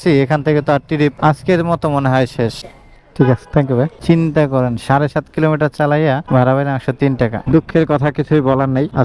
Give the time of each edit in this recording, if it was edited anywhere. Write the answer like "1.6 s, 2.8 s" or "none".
2.6 s, 4.0 s, 7.4 s